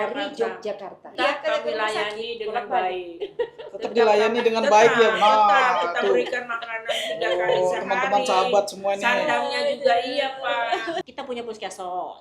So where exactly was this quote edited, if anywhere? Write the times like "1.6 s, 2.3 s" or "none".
1.1 s, 11.1 s